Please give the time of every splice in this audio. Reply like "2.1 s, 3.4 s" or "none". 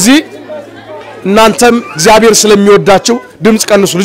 none